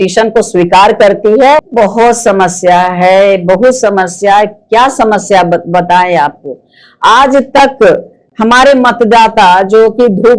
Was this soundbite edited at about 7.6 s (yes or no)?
no